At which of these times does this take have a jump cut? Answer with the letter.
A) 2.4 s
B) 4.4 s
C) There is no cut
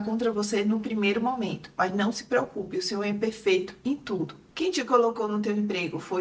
B